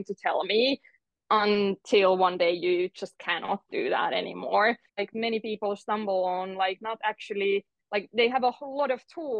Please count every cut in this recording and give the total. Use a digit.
1